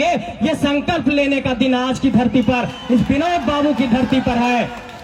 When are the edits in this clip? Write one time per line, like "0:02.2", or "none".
none